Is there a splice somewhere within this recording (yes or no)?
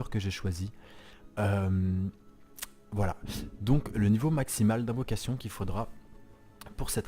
no